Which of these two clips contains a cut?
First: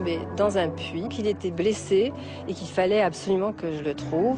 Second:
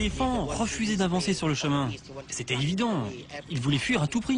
first; 1 cut; at 1.1 s

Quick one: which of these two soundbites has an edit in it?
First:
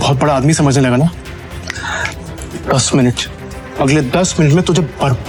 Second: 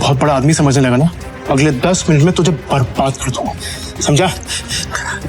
second; 1 cut; at 1.3 s

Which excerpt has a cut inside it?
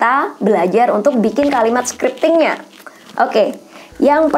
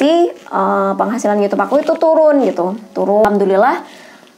second; 1 cut; at 3.2 s

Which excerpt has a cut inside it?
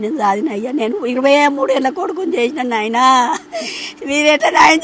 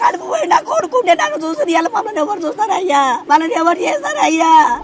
second; 1 cut; at 3.2 s

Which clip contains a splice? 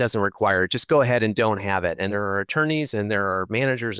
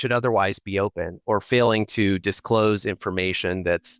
first; 1 cut; at 2.1 s

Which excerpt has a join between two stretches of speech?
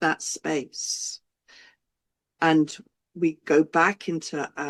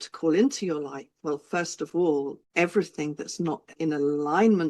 second; 2 cuts; at 2.4 s, 3.7 s

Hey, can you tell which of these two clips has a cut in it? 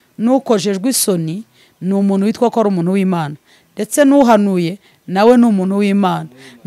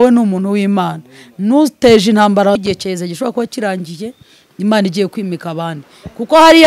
second; 1 cut; at 2.6 s

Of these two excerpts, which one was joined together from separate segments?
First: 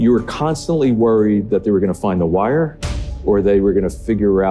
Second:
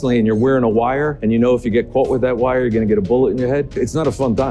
second; 2 cuts; at 1.1 s, 3.8 s

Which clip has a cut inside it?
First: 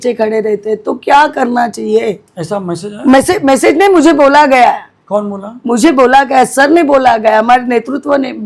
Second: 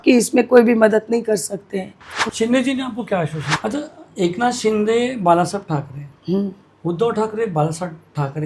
second; 2 cuts; at 2.2 s, 3.4 s

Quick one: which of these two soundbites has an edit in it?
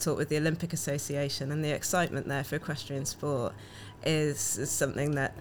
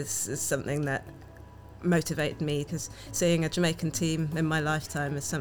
second; 1 cut; at 2.7 s

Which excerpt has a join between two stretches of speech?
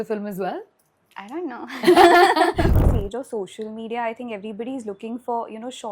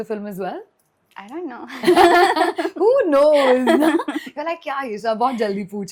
first; 1 cut; at 2.7 s

